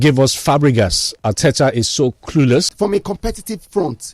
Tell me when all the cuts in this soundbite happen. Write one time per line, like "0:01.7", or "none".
0:02.7

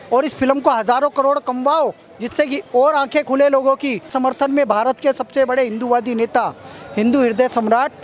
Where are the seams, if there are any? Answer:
0:04.1

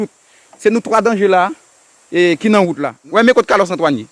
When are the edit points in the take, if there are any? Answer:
0:02.9

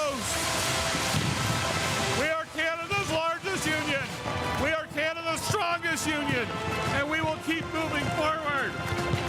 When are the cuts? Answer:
none

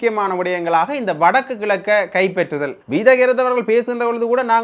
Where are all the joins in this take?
0:02.8

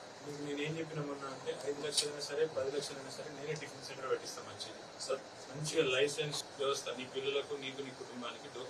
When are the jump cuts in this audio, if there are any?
0:06.5

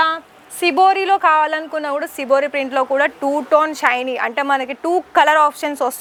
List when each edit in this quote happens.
none

